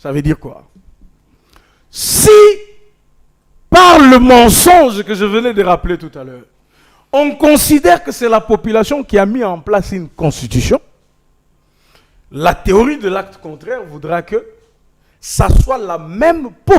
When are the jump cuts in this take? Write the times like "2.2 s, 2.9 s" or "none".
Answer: none